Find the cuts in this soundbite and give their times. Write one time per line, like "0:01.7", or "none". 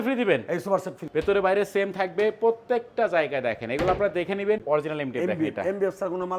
0:01.0
0:04.6